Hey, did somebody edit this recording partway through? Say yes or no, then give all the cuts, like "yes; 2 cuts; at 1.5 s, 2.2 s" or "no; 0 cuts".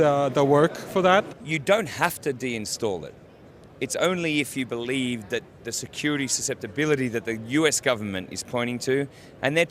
yes; 1 cut; at 1.4 s